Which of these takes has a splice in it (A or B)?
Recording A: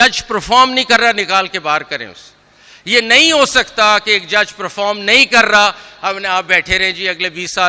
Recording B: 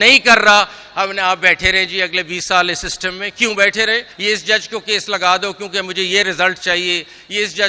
B